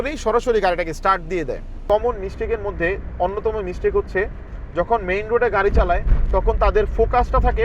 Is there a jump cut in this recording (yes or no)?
yes